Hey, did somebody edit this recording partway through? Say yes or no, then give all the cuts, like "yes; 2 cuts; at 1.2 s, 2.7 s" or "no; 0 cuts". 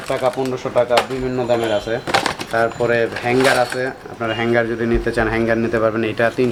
no; 0 cuts